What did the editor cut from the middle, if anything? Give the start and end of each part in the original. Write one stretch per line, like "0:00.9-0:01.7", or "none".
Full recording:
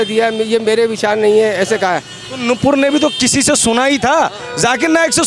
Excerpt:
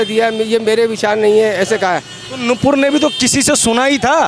none